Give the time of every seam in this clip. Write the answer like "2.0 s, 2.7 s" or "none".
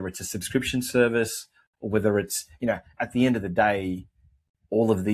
none